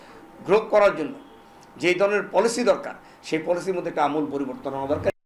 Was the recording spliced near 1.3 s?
no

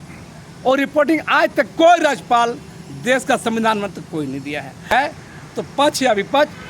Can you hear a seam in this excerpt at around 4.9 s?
yes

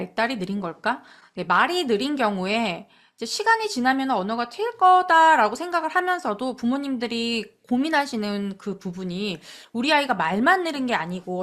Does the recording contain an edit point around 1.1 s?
no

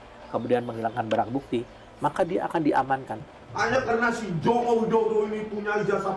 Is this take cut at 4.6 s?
no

